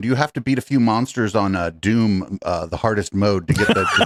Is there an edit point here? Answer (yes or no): no